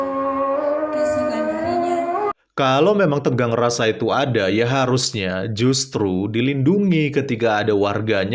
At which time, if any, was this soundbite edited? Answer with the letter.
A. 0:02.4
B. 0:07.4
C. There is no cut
A